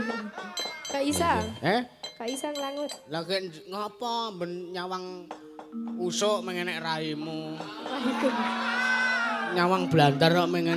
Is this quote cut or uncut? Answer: uncut